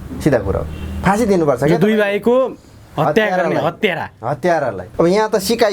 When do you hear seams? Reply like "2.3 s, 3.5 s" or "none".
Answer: 4.8 s

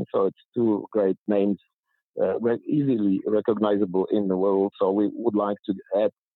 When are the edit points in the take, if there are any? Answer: none

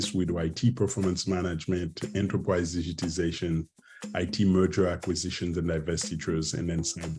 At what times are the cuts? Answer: none

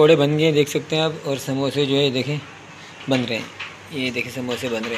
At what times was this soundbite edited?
none

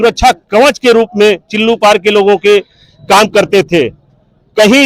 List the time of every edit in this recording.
none

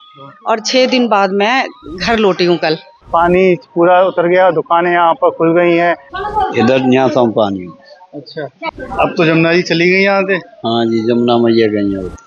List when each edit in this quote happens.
3.0 s, 6.1 s, 8.7 s

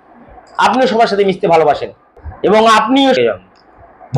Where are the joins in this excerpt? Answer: 3.2 s

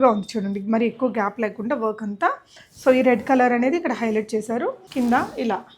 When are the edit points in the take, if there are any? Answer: 4.8 s

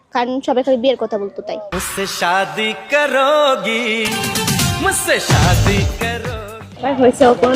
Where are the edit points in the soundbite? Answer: none

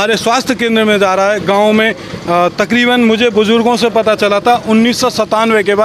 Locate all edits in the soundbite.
none

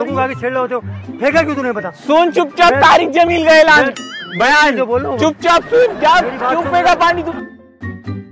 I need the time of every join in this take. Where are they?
7.3 s

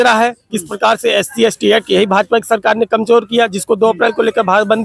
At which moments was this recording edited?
none

